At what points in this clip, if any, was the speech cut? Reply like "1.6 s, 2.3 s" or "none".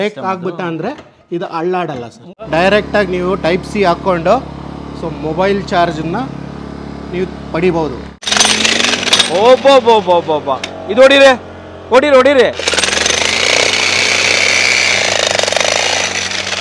2.3 s, 8.2 s